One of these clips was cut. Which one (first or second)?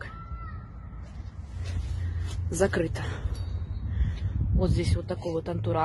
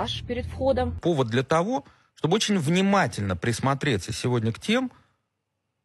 second